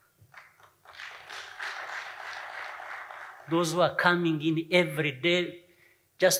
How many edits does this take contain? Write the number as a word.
zero